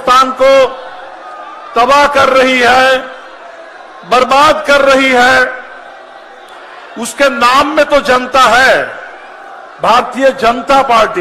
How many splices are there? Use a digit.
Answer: 0